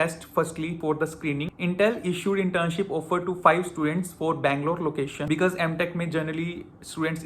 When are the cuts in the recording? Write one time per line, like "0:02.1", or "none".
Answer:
0:01.5
0:05.2